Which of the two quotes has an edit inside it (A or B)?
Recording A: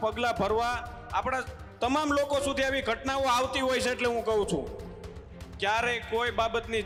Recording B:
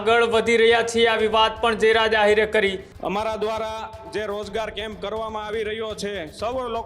B